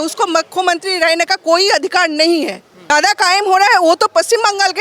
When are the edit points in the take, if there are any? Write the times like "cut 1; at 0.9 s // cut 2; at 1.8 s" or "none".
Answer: cut 1; at 2.9 s